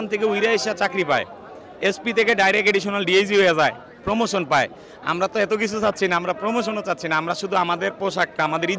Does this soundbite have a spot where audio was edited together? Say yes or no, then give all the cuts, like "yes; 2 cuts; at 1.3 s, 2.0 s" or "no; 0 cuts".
no; 0 cuts